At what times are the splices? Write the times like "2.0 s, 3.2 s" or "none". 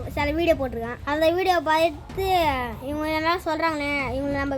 1.0 s